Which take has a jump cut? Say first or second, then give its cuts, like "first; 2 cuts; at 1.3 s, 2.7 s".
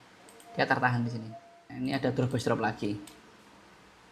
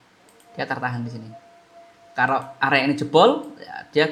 first; 1 cut; at 1.6 s